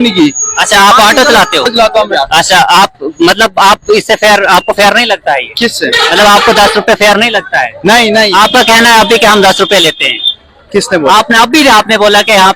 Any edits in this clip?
no; 0 cuts

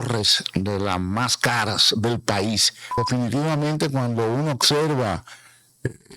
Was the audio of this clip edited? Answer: yes; 1 cut; at 2.8 s

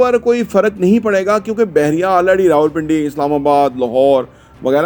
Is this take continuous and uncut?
yes; 0 cuts

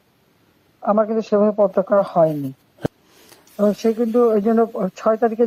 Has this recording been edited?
yes; 1 cut; at 2.9 s

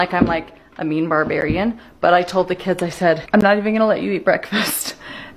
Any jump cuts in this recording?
no; 0 cuts

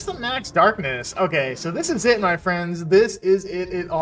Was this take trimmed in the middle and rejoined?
no; 0 cuts

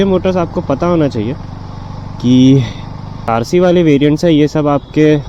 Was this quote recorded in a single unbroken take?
no; 1 cut; at 3.2 s

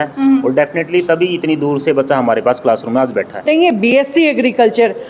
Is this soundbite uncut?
no; 1 cut; at 3.4 s

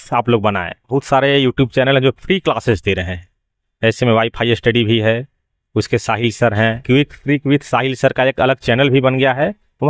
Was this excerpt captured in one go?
no; 2 cuts; at 0.9 s, 6.8 s

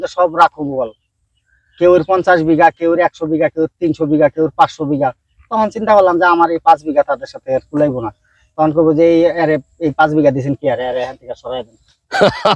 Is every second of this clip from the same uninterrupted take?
yes; 0 cuts

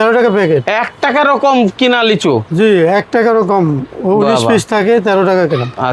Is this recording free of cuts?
yes; 0 cuts

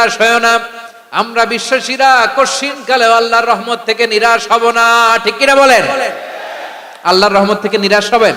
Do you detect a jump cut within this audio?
no; 0 cuts

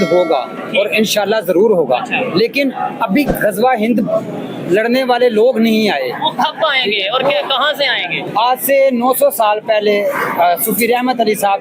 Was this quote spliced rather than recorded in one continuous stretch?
yes; 1 cut; at 8.2 s

